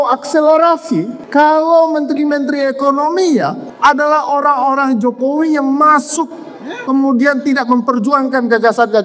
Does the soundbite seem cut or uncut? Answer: cut